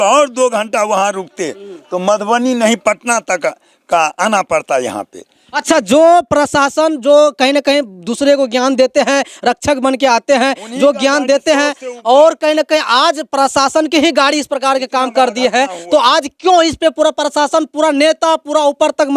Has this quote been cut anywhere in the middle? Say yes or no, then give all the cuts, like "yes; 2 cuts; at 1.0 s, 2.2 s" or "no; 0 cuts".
no; 0 cuts